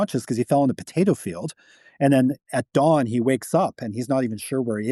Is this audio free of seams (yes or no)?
yes